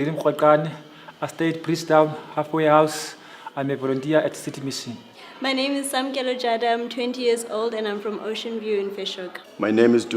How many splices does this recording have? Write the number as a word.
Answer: one